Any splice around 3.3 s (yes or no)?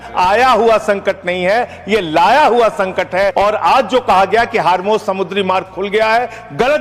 yes